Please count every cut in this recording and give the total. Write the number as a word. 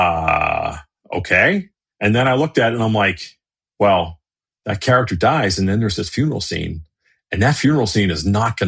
one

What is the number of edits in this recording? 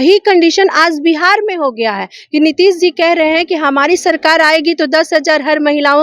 zero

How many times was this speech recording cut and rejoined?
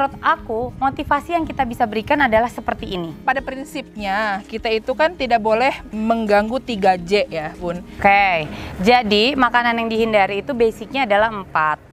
three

